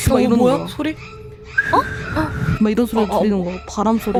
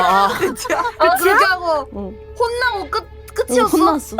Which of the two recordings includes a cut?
second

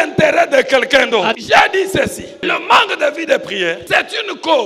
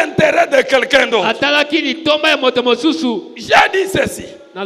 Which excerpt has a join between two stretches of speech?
first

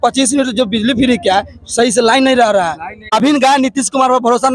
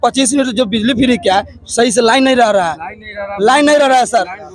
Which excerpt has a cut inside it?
first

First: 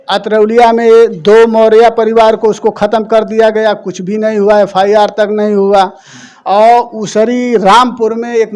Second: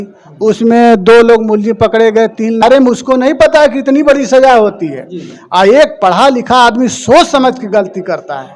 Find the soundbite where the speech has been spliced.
second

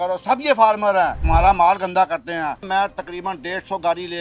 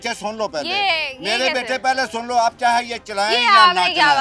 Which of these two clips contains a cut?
first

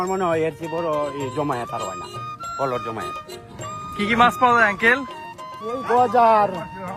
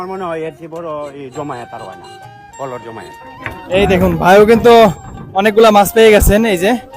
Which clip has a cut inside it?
second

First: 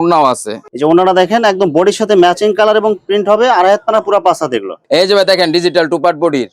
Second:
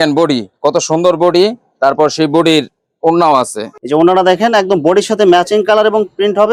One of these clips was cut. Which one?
first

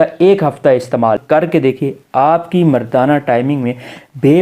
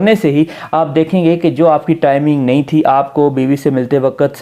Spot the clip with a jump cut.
first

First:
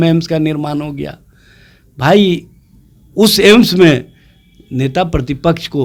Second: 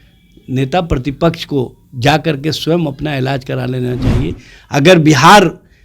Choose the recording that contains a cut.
second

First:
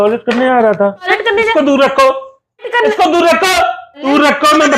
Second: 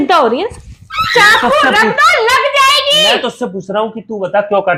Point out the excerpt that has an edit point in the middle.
first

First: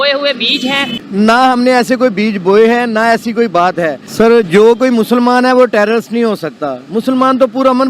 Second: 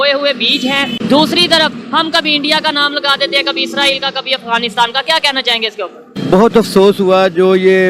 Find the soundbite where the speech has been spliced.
first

